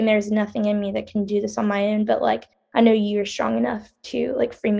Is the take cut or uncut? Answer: uncut